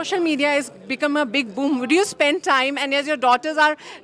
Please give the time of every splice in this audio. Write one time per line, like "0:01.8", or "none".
none